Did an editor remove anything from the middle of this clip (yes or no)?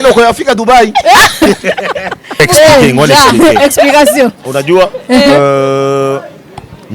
yes